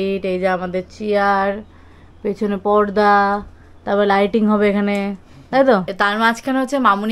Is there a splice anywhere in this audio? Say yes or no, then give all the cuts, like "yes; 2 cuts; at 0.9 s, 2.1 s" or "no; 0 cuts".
yes; 1 cut; at 5.9 s